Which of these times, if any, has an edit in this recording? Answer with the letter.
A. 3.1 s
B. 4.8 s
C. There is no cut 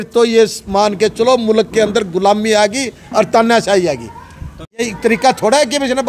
B